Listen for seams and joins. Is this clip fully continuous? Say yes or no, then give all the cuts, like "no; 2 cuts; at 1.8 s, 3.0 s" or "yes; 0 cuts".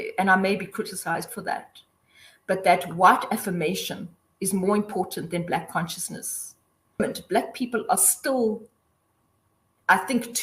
no; 1 cut; at 7.0 s